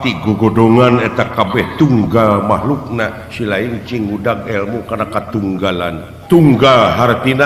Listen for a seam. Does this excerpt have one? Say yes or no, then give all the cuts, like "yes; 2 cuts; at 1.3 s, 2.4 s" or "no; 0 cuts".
yes; 1 cut; at 6.1 s